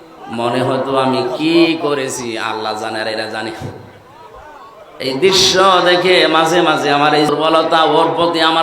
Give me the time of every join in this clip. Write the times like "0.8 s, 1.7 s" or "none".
7.3 s